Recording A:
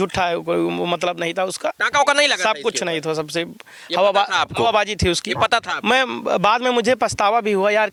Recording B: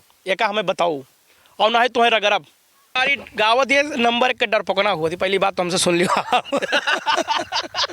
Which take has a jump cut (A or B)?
B